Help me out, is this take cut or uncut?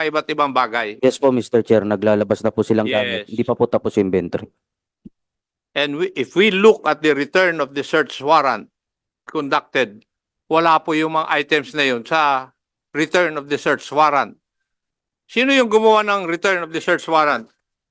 uncut